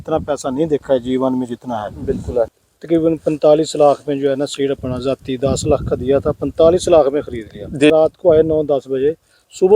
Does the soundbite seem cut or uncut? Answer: cut